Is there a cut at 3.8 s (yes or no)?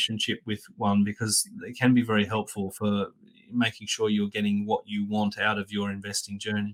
no